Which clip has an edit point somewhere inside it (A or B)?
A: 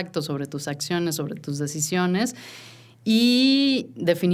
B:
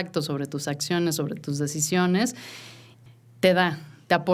B